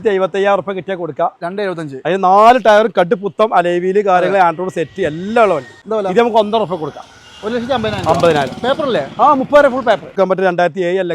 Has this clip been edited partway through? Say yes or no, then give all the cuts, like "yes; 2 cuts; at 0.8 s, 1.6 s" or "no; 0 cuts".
yes; 2 cuts; at 5.8 s, 10.1 s